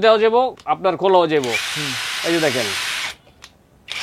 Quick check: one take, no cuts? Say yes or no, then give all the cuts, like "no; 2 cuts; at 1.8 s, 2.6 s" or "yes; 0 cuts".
yes; 0 cuts